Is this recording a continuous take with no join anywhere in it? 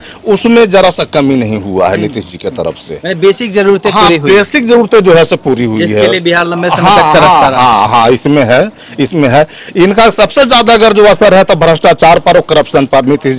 yes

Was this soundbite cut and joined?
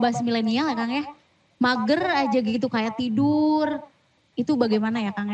yes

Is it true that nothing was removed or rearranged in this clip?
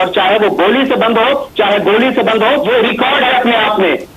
no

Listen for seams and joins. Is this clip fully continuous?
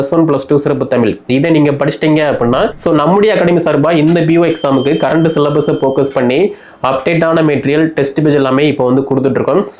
no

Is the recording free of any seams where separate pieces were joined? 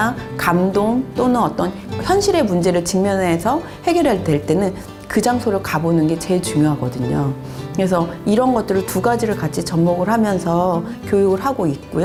yes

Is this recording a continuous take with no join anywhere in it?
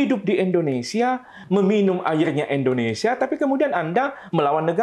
no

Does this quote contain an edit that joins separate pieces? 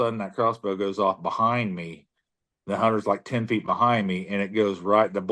no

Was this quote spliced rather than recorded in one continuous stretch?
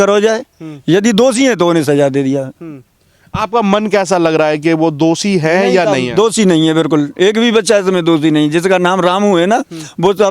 no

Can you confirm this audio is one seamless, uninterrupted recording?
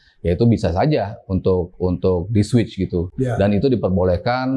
yes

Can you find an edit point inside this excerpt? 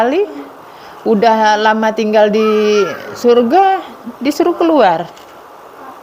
no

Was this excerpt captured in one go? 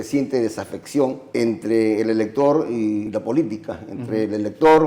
no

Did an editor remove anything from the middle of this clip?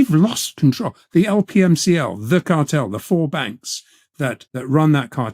yes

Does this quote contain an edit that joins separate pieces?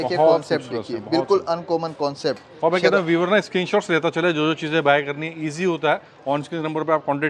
no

